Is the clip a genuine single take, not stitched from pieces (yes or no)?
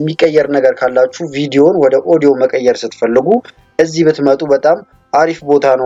yes